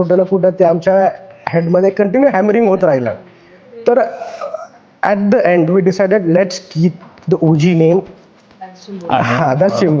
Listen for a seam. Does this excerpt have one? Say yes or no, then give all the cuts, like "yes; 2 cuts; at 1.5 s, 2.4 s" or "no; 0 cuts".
no; 0 cuts